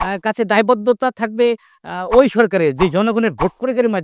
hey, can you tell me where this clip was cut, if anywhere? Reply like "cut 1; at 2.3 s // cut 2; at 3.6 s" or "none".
none

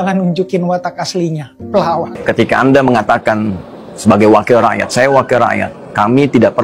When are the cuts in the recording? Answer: cut 1; at 2.2 s

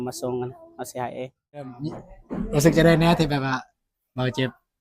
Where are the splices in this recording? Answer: cut 1; at 1.9 s

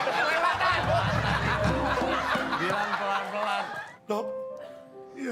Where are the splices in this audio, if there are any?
cut 1; at 3.8 s

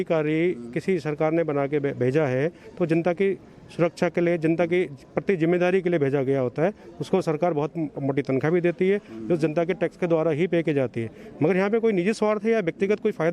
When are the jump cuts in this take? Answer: none

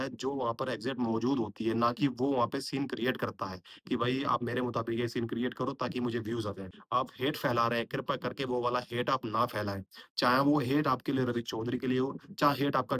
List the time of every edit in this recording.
cut 1; at 6.7 s

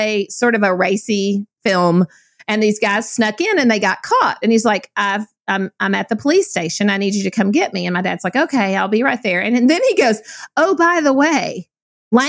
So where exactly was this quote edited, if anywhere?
cut 1; at 1.5 s

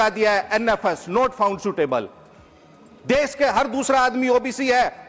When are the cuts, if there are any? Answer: none

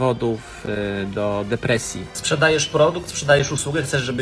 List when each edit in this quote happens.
cut 1; at 1.9 s

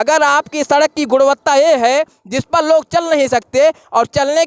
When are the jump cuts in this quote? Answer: none

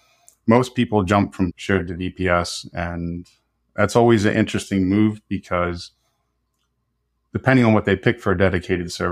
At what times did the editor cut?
cut 1; at 1.6 s

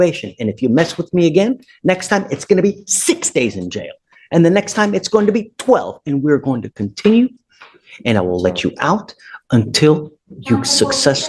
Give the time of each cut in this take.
none

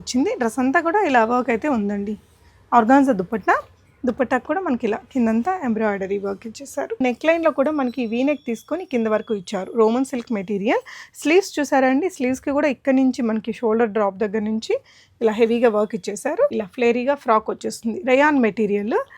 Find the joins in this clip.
cut 1; at 7.0 s // cut 2; at 16.5 s

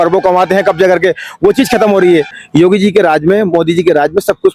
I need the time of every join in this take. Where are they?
cut 1; at 2.4 s

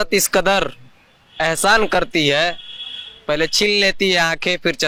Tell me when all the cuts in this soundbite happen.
none

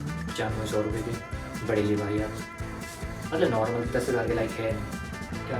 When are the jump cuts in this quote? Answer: none

